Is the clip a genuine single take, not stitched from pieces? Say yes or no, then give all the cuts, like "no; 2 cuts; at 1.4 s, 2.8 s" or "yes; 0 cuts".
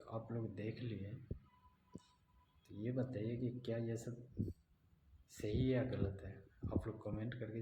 no; 1 cut; at 1.2 s